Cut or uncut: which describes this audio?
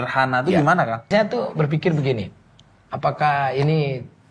cut